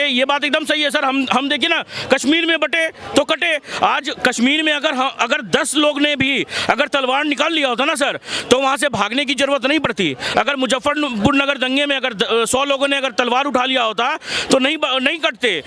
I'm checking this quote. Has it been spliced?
no; 0 cuts

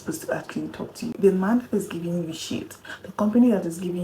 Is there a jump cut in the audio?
yes; 1 cut; at 1.2 s

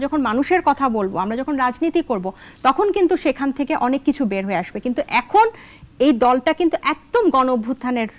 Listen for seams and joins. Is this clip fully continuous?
yes; 0 cuts

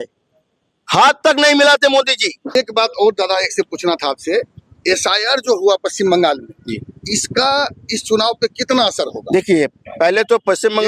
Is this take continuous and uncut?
yes; 0 cuts

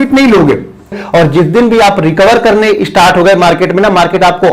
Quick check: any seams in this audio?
yes; 1 cut; at 1.0 s

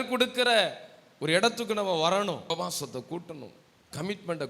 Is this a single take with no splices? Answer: no; 1 cut; at 2.5 s

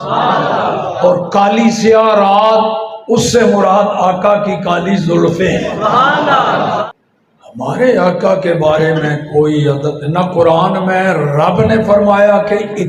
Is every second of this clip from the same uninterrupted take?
no; 1 cut; at 6.9 s

